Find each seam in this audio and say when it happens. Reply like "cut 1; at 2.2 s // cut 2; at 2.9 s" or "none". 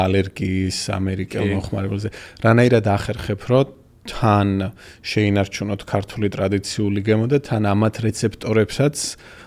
none